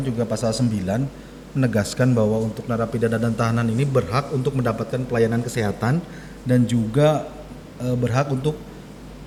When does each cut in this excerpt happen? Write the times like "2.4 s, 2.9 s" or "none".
none

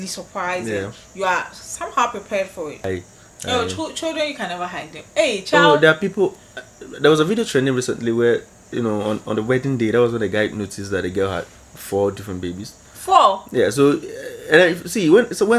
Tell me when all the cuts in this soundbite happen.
2.8 s

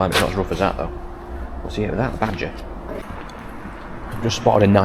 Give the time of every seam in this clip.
3.0 s

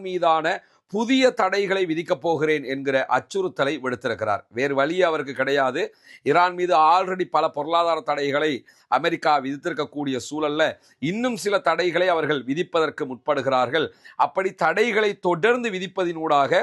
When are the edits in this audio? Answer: none

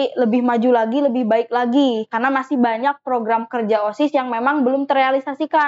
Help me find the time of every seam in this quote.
none

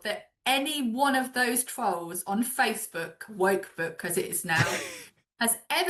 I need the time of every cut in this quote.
none

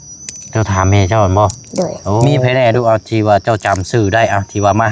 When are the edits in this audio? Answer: 2.2 s

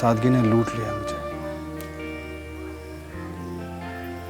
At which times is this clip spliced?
none

